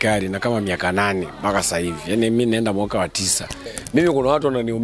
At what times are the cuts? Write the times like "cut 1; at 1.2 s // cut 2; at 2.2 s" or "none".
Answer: cut 1; at 3.7 s